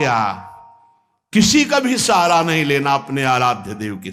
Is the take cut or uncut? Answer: uncut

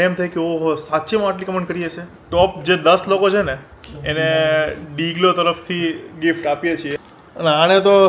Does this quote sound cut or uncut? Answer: cut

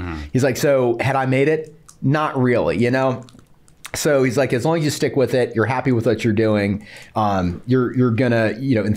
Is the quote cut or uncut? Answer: uncut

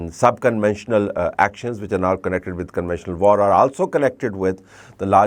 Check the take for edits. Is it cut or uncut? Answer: uncut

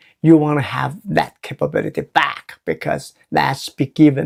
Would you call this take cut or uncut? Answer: uncut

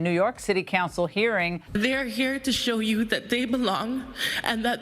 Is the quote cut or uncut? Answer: cut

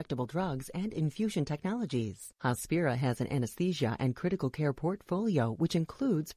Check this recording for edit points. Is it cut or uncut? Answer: cut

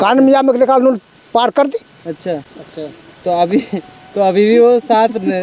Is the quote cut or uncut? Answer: uncut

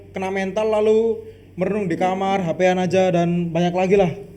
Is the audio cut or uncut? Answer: uncut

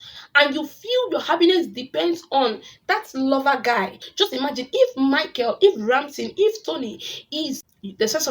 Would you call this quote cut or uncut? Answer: cut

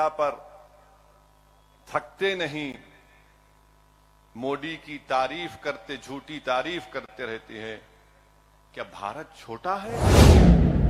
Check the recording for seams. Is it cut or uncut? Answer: cut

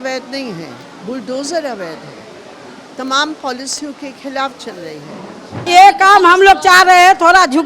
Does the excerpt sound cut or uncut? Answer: cut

